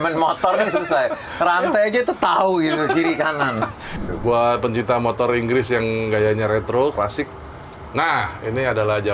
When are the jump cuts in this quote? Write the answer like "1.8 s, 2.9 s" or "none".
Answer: 3.9 s